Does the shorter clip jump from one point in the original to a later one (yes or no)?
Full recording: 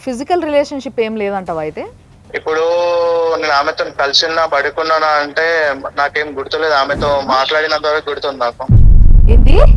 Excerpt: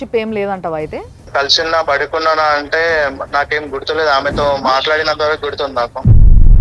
yes